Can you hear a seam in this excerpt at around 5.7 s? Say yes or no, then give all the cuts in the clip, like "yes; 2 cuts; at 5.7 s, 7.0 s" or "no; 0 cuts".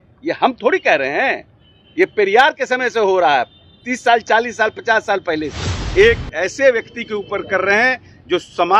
yes; 1 cut; at 5.7 s